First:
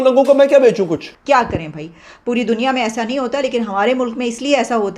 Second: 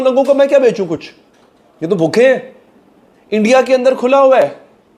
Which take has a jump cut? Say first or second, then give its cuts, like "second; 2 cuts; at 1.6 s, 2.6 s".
first; 1 cut; at 1.1 s